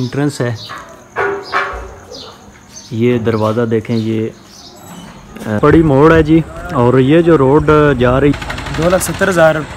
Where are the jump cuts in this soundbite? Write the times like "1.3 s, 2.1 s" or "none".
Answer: 5.6 s, 8.3 s